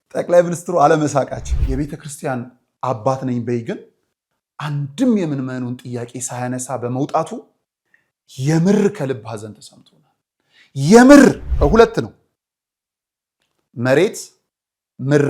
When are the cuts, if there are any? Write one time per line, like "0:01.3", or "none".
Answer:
0:01.5
0:11.5